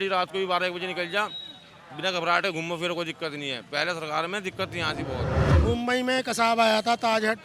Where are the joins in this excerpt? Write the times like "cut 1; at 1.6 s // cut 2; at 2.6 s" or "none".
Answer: cut 1; at 5.5 s